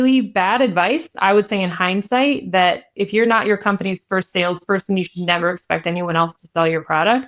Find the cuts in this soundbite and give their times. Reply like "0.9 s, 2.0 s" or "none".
none